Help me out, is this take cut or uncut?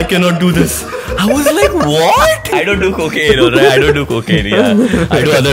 cut